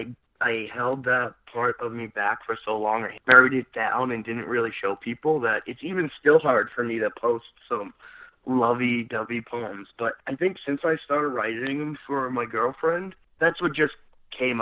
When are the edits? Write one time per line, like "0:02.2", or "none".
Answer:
0:03.2